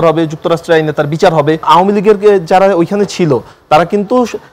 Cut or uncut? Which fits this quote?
cut